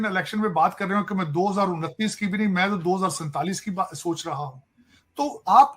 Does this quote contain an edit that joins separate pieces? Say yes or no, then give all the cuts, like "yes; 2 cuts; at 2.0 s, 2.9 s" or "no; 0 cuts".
no; 0 cuts